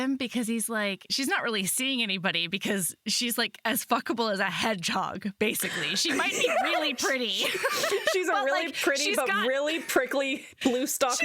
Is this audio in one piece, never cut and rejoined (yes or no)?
no